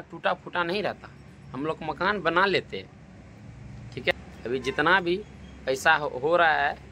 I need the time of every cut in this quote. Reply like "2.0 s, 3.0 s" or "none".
4.1 s